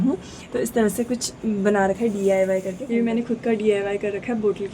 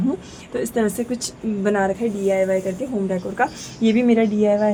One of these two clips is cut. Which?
first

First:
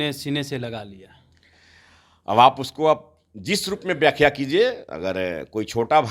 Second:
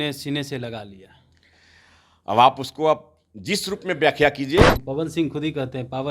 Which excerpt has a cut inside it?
second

